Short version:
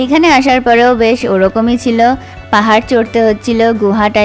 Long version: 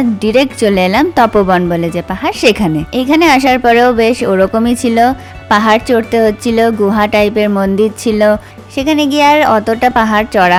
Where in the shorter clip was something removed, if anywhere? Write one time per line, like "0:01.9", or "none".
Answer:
none